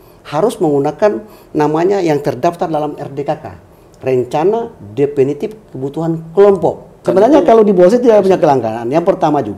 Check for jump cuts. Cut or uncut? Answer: cut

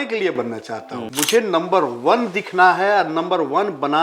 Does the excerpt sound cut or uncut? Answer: cut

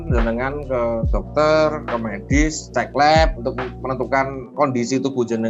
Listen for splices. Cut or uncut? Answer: uncut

